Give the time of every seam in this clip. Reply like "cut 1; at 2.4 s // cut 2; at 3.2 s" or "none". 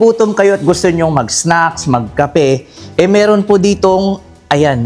none